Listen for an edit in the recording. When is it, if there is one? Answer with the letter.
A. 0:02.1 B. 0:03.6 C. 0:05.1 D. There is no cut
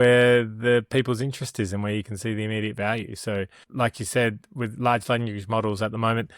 B